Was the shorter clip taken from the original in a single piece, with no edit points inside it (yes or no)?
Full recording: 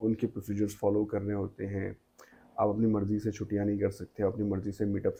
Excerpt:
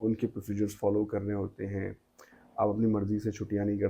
yes